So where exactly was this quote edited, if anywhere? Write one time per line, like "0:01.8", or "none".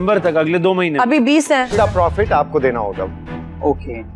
0:01.7